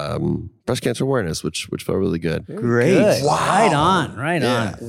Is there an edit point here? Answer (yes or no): yes